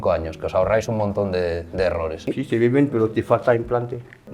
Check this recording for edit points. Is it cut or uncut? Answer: cut